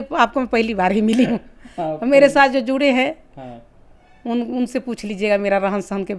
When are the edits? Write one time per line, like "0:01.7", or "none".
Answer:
none